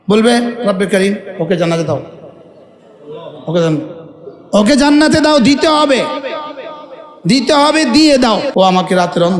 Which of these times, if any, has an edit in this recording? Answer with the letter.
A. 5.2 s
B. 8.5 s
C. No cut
B